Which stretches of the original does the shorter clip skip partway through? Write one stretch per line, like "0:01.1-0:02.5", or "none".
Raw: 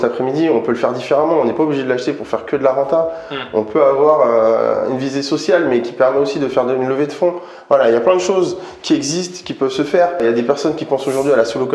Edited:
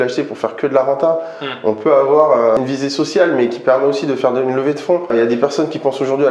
0:04.5-0:04.9
0:07.4-0:10.2